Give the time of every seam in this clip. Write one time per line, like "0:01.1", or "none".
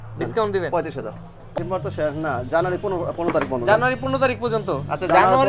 0:01.6